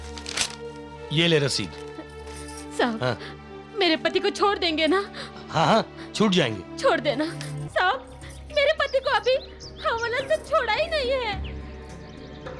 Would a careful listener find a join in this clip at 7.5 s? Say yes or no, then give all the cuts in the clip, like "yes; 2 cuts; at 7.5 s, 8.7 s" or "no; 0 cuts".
yes; 1 cut; at 7.5 s